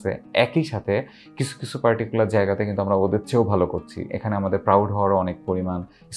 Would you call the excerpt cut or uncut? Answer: uncut